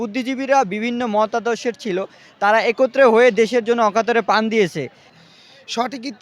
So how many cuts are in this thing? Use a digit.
1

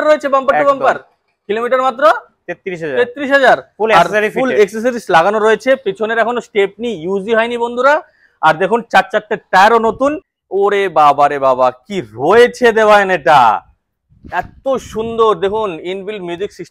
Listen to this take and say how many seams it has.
1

